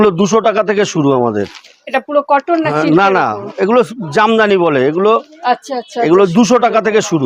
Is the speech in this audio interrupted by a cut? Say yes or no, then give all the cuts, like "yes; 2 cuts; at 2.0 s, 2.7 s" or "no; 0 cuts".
no; 0 cuts